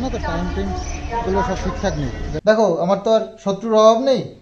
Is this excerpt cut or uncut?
cut